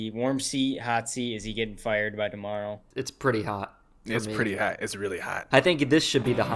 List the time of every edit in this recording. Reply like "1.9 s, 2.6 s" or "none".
2.9 s, 5.4 s